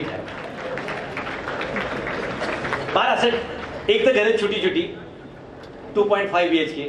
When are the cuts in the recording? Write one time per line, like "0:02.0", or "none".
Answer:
none